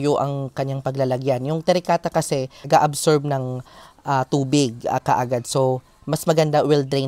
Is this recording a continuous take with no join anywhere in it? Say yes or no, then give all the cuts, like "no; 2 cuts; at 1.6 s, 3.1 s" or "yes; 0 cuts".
yes; 0 cuts